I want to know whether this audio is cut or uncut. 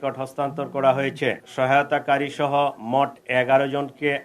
cut